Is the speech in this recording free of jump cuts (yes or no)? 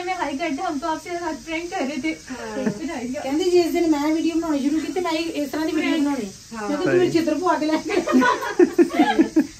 no